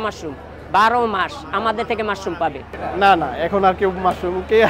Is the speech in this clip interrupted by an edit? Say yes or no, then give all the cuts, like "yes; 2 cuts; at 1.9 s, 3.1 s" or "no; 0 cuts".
yes; 1 cut; at 2.7 s